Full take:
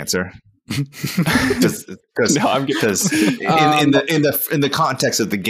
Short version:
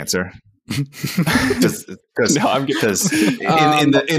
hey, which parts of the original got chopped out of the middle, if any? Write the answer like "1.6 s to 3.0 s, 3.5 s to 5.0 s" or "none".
none